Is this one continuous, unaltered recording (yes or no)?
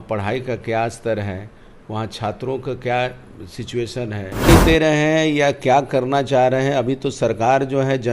no